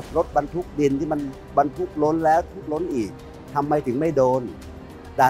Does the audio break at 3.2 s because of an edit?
no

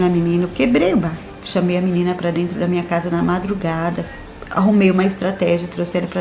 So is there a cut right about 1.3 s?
yes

